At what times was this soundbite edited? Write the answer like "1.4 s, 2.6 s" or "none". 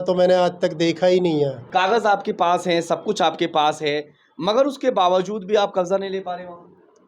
1.6 s

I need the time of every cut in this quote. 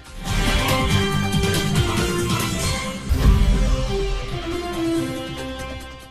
none

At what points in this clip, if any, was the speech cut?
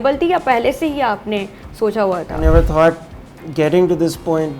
2.4 s

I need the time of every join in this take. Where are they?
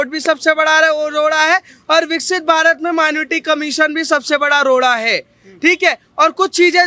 none

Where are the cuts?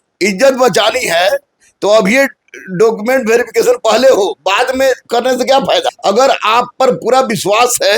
5.9 s

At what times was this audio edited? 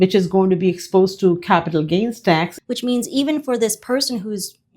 2.5 s

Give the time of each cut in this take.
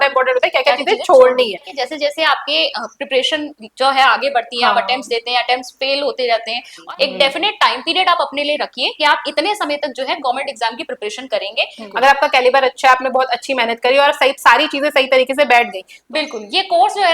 1.8 s, 6.7 s, 11.8 s, 16.0 s

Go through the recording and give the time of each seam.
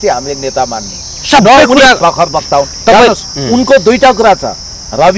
none

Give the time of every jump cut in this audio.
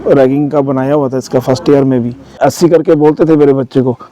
2.4 s

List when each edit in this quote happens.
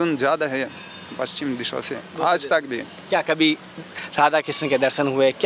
2.9 s

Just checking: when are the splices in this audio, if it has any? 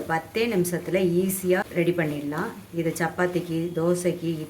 1.7 s

